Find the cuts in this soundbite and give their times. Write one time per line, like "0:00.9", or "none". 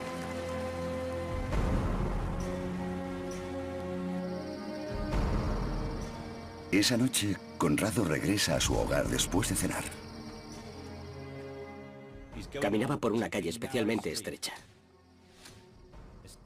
0:01.7

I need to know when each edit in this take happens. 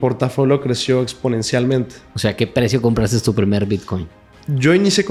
none

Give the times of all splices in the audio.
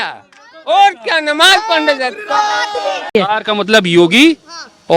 0:03.1

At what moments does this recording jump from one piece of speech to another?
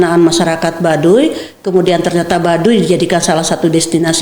none

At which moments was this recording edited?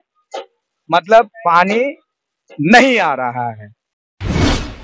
0:03.9

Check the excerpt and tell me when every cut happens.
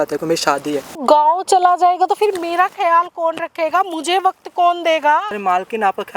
0:01.0
0:05.3

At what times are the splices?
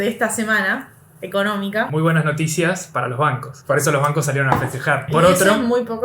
0:01.9
0:03.5
0:05.1

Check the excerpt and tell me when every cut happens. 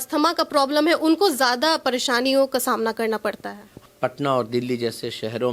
0:03.8

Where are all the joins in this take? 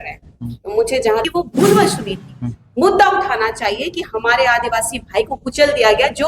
0:01.2

